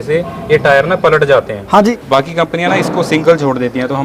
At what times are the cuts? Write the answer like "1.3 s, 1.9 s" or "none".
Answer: 1.9 s